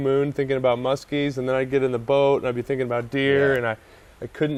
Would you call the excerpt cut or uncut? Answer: uncut